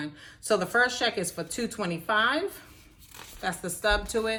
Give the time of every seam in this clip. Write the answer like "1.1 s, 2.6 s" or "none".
none